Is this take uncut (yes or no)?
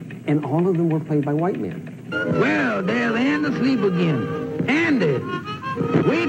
no